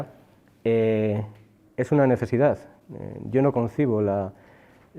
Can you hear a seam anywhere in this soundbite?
no; 0 cuts

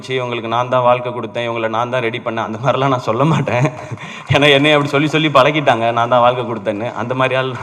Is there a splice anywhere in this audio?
no; 0 cuts

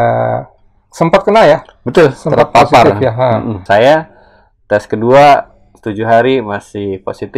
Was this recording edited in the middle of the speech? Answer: yes; 1 cut; at 3.6 s

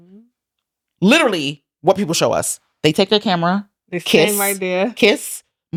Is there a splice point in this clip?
no; 0 cuts

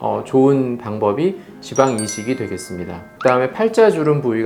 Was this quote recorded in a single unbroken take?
yes; 0 cuts

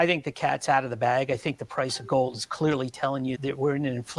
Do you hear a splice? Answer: no; 0 cuts

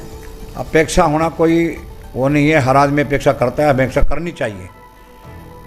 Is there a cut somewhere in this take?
no; 0 cuts

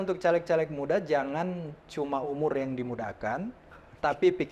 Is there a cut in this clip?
no; 0 cuts

